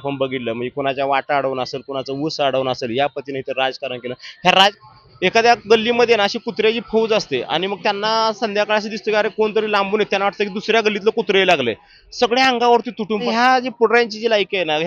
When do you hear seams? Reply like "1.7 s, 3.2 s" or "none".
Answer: 4.8 s, 13.3 s